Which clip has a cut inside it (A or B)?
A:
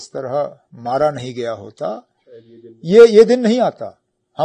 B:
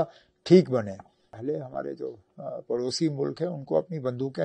B